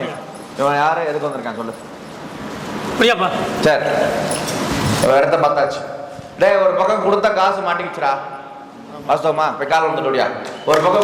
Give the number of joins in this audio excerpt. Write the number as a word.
zero